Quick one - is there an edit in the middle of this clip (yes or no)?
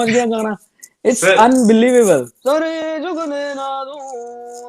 yes